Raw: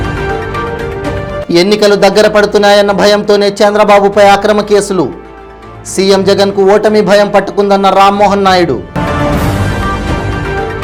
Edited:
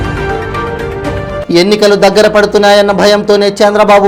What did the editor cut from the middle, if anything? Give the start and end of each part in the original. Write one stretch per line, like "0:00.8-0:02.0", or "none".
none